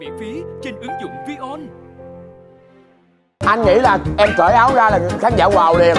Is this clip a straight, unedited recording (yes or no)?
no